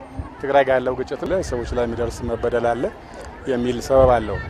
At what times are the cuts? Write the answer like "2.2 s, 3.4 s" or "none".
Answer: 1.2 s